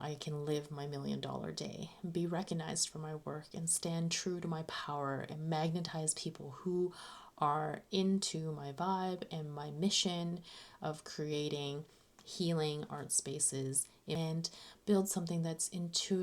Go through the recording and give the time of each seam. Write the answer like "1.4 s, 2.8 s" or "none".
14.2 s